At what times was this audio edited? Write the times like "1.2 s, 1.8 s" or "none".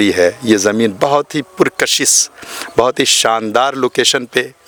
none